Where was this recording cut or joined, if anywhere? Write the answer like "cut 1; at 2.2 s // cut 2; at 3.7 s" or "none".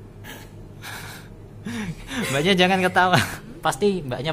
cut 1; at 3.4 s